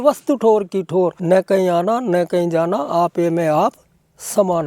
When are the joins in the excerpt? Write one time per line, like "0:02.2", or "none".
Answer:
0:01.2